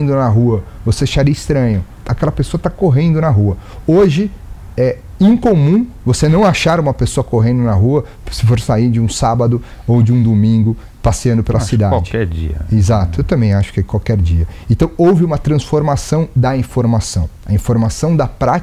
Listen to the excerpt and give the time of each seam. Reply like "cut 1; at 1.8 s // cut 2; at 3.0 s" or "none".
cut 1; at 1.9 s